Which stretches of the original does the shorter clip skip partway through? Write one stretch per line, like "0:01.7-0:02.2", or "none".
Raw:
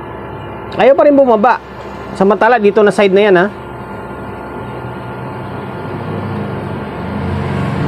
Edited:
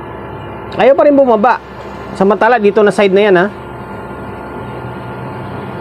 none